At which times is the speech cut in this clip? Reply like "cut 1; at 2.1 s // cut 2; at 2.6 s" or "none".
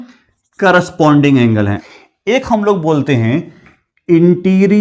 cut 1; at 1.8 s